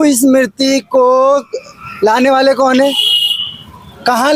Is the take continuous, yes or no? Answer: yes